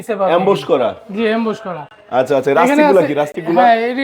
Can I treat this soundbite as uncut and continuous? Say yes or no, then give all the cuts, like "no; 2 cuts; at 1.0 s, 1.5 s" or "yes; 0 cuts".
yes; 0 cuts